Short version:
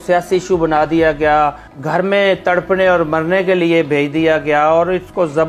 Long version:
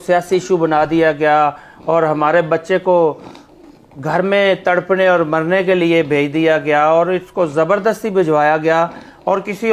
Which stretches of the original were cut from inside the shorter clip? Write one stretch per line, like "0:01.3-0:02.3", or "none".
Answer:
0:01.7-0:03.9

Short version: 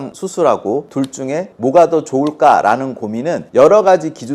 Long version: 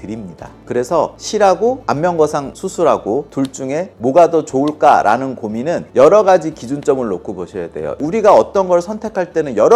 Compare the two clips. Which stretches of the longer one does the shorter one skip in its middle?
none

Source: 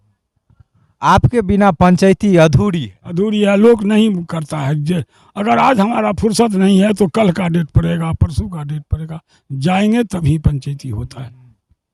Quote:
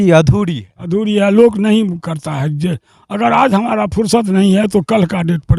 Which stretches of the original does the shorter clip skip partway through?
none

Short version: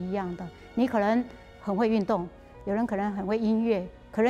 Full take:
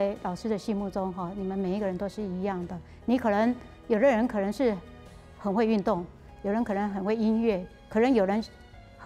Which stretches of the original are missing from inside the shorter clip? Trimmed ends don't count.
0:03.7-0:05.2

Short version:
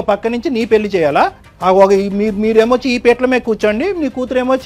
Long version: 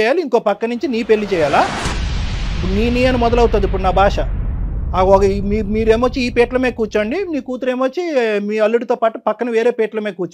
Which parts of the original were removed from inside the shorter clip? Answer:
0:01.8-0:04.8

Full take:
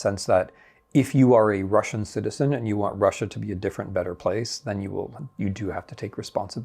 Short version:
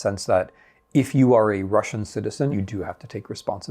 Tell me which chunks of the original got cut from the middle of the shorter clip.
0:02.5-0:05.4

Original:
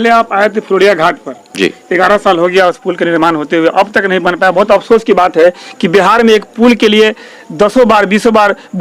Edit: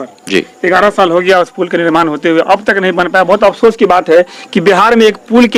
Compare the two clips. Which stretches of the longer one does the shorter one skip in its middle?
none

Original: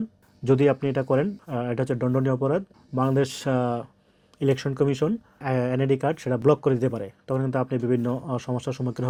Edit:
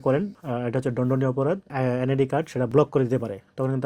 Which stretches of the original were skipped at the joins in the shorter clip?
0:02.7-0:05.4

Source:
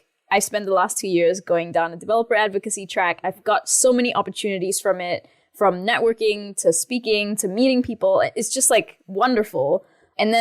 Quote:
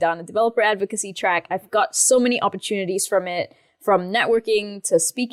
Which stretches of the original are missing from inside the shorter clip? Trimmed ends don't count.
none

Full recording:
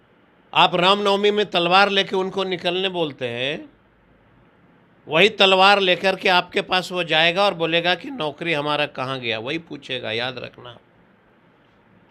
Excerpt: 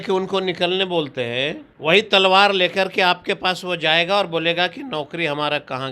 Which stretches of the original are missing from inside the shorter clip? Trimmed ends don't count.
0:03.7-0:04.9

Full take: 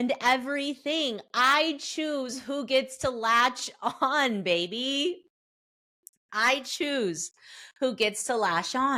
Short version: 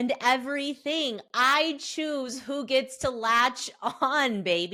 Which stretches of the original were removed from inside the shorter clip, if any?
none

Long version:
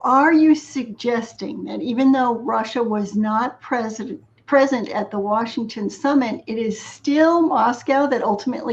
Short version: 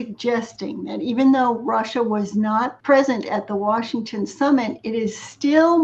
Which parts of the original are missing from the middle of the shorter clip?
0:03.6-0:04.4

